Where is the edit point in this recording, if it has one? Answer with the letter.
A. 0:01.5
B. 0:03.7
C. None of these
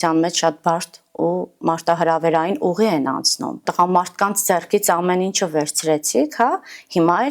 B